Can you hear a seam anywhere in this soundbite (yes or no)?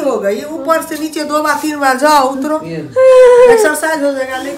no